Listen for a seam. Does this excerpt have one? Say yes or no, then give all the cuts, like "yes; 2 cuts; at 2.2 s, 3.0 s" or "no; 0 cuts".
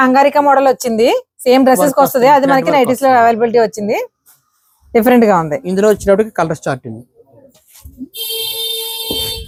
no; 0 cuts